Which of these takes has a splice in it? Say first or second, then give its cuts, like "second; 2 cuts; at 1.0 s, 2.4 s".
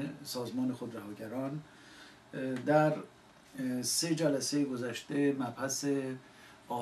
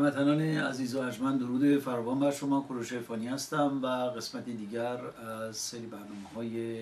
first; 1 cut; at 3.7 s